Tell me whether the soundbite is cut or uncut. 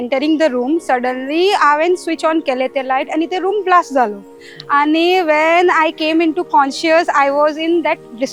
uncut